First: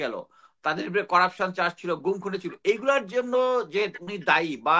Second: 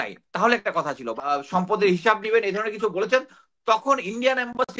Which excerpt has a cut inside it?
second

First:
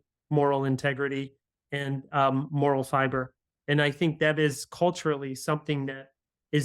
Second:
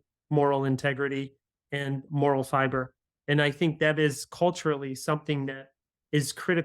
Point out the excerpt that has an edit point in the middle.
second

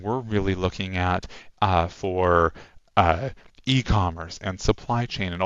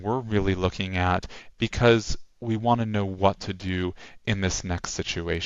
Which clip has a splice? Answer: second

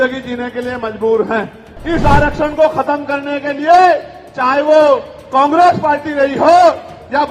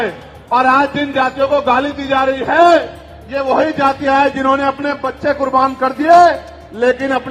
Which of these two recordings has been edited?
first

